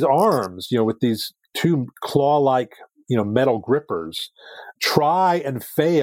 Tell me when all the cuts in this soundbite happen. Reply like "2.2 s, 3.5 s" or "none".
none